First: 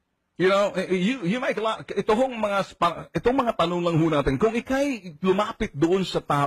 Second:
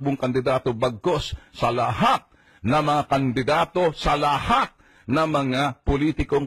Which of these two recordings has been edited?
first; 1 cut; at 2.5 s

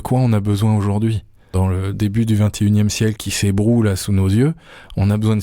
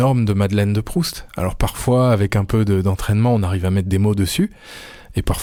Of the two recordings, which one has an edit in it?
first; 2 cuts; at 1.5 s, 3.3 s

